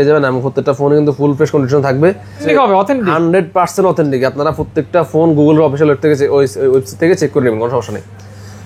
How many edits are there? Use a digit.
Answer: 1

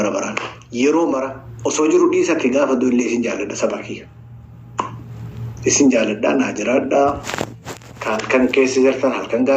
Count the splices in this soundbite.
1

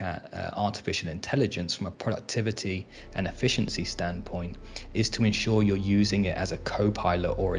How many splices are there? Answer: 1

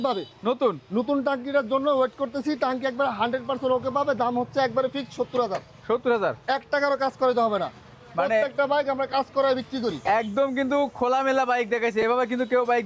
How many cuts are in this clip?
0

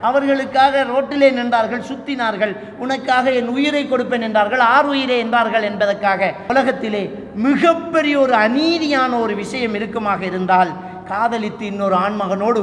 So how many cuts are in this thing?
1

